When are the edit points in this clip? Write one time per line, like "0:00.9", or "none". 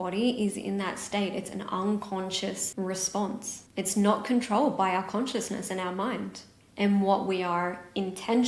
none